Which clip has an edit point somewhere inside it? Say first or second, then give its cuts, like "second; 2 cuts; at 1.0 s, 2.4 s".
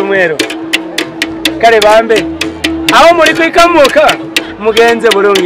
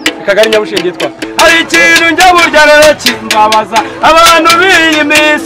second; 1 cut; at 1.2 s